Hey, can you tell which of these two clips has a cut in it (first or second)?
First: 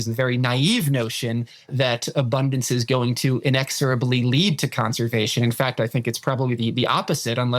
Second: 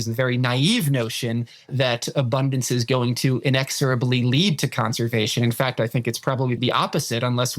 second